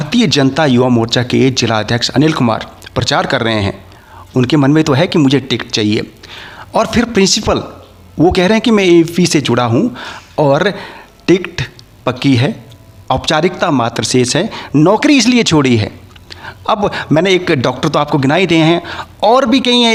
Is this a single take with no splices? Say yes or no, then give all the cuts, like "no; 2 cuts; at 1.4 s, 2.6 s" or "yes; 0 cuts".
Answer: yes; 0 cuts